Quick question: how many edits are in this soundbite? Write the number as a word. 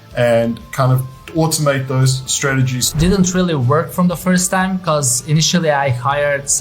one